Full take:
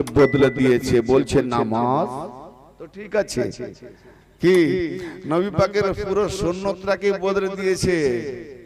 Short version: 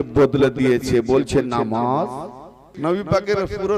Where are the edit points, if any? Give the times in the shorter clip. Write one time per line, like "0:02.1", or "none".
0:02.6